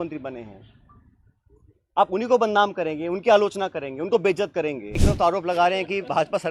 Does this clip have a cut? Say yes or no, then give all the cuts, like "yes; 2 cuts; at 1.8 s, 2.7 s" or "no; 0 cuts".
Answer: yes; 1 cut; at 5.0 s